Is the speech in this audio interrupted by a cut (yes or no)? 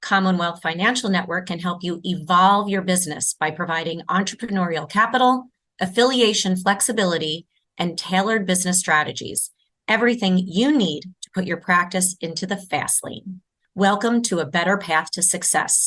no